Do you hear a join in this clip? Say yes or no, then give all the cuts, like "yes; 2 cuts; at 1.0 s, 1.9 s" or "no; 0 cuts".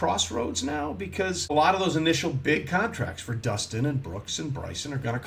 yes; 1 cut; at 1.5 s